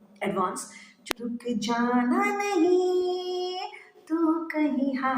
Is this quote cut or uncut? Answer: cut